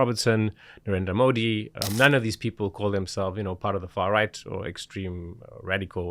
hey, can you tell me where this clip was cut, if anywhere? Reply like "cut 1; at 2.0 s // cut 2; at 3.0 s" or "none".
cut 1; at 1.8 s